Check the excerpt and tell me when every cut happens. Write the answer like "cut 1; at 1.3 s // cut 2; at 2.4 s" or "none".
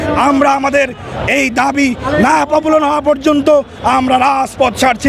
none